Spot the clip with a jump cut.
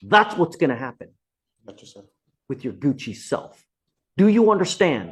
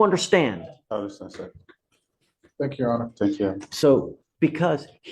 second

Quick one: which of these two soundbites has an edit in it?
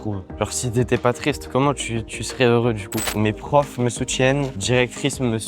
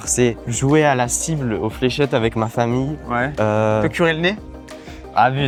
first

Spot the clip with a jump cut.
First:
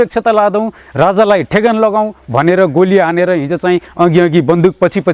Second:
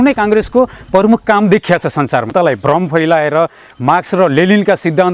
second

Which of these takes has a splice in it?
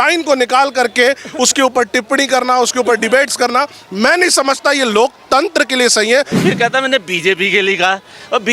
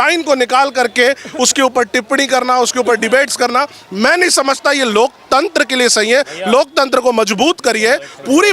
first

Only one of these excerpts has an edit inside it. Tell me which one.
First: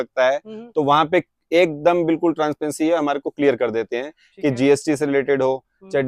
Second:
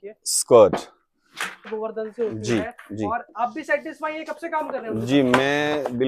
second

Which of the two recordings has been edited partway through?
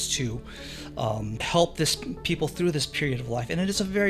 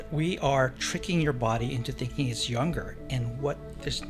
first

